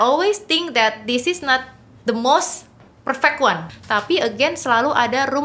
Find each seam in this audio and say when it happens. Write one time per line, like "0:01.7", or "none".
0:03.7